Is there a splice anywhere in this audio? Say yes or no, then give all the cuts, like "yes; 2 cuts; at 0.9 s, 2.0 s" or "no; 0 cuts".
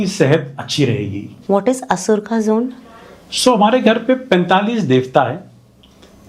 yes; 1 cut; at 1.3 s